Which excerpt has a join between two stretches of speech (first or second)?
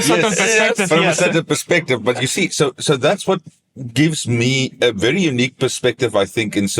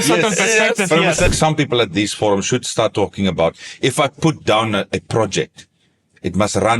second